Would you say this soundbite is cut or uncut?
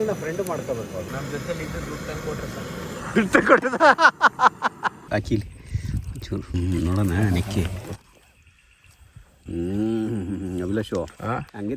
cut